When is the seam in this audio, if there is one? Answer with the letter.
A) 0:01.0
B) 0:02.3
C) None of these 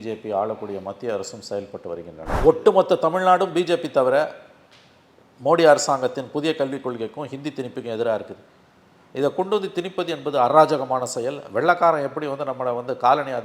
B